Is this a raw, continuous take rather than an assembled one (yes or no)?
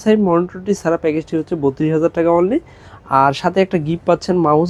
yes